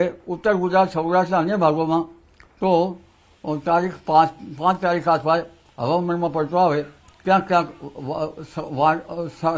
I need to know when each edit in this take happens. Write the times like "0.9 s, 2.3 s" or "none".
none